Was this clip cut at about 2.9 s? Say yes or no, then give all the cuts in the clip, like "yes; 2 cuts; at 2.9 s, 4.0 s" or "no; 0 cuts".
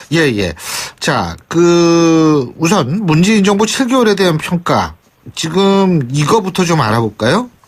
yes; 1 cut; at 2.9 s